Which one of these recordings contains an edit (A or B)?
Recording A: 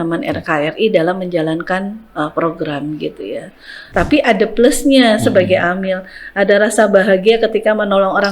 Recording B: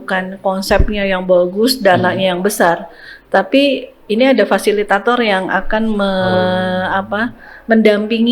A